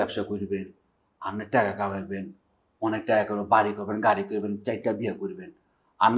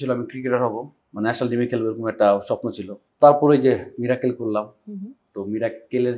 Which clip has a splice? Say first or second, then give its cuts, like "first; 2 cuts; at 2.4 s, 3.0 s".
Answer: second; 1 cut; at 1.0 s